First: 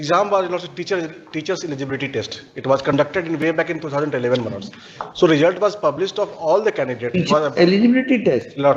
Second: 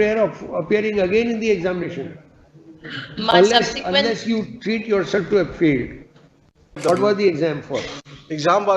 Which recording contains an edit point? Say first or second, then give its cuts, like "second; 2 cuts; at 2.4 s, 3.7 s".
second; 1 cut; at 6.8 s